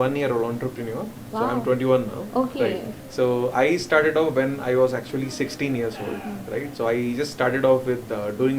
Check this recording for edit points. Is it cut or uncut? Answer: uncut